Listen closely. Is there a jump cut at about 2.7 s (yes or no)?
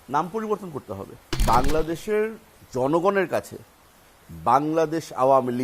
no